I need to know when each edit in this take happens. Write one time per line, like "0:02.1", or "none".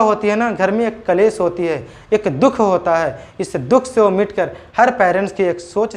none

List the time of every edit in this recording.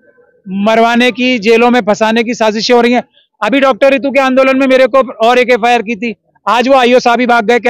none

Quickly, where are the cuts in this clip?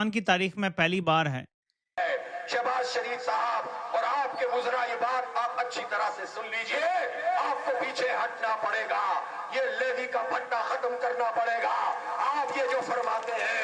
0:02.0

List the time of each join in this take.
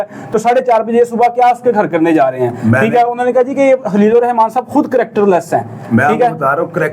none

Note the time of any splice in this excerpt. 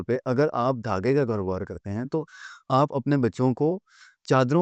none

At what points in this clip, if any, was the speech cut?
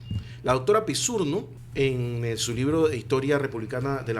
0:01.6

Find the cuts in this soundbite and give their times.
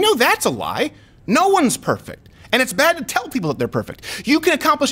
none

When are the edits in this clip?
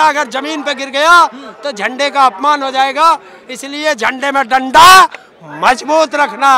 none

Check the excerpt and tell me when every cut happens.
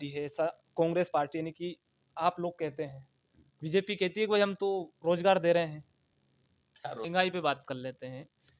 0:07.1

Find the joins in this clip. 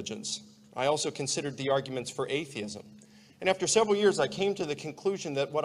0:04.0

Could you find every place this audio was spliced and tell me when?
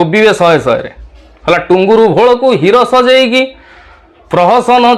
none

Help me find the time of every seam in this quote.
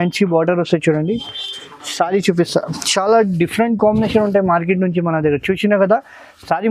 none

